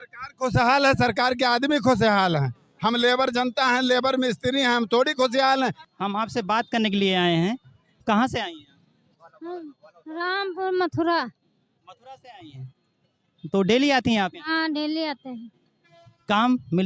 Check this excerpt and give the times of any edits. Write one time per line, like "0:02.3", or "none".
0:05.9